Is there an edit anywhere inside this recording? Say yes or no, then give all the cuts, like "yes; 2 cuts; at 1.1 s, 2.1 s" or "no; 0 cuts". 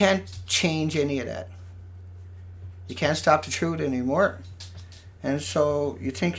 no; 0 cuts